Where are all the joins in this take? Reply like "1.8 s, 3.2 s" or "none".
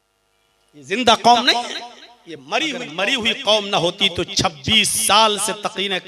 3.0 s

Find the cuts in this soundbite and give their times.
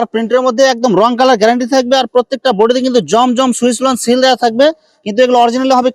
none

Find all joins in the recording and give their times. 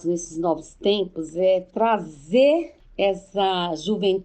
2.8 s

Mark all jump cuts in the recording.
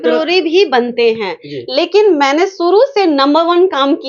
none

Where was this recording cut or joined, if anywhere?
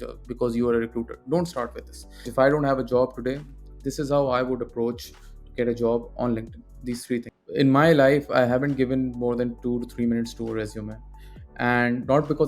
2.3 s, 7.4 s

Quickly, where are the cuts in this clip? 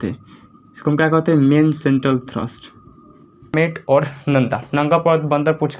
3.5 s

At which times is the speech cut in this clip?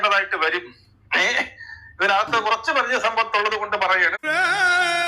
4.2 s

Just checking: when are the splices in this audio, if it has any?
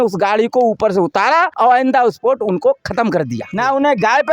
1.5 s, 3.4 s

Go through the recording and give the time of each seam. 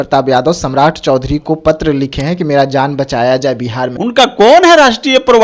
3.9 s

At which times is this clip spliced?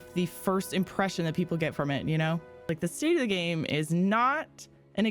2.7 s

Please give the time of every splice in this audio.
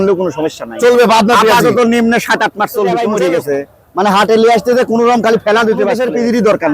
2.8 s, 5.5 s

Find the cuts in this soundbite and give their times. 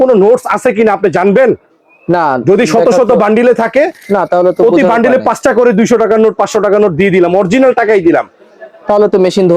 none

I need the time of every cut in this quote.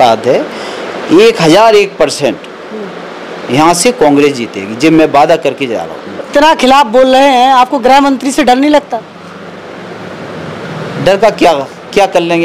6.3 s

